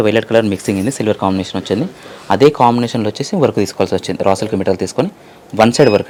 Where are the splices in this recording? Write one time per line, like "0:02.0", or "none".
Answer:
none